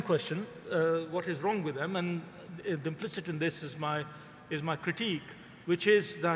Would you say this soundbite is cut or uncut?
uncut